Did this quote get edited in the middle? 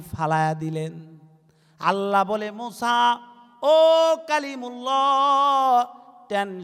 no; 0 cuts

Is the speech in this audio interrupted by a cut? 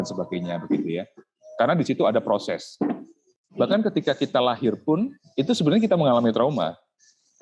yes; 1 cut; at 3.2 s

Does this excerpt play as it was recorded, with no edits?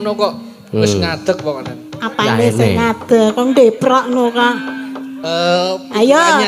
yes; 0 cuts

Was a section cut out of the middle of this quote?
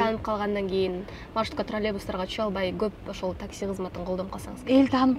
no; 0 cuts

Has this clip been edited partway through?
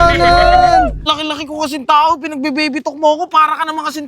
yes; 1 cut; at 1.1 s

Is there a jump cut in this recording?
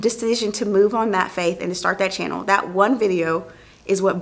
no; 0 cuts

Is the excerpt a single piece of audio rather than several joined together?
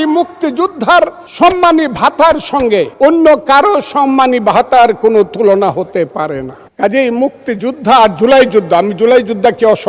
no; 3 cuts; at 1.2 s, 2.9 s, 6.6 s

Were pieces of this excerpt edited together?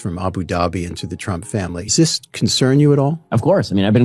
yes; 1 cut; at 1.9 s

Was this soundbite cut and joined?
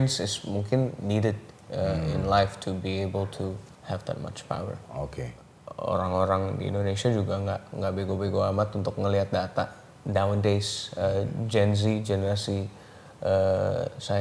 yes; 1 cut; at 5.5 s

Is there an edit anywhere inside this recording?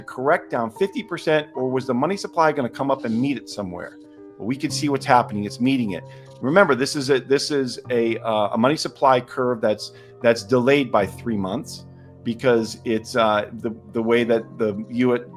no; 0 cuts

